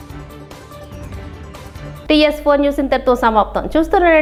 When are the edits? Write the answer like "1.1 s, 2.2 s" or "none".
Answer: none